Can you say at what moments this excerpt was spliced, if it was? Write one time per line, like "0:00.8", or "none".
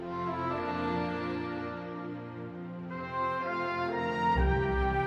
0:01.9